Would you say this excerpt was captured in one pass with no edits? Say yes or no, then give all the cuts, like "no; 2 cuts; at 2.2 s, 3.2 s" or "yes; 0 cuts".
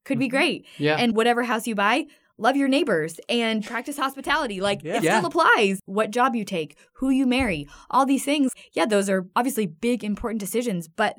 no; 3 cuts; at 1.1 s, 5.8 s, 9.0 s